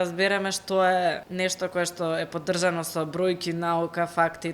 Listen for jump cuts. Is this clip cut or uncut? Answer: cut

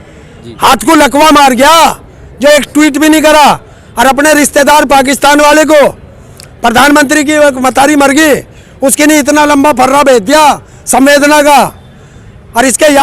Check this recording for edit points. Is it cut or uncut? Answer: uncut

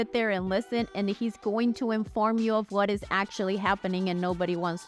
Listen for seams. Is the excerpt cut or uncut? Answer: uncut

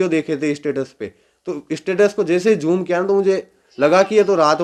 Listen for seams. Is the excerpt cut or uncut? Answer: uncut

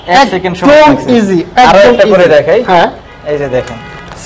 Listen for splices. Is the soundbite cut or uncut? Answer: uncut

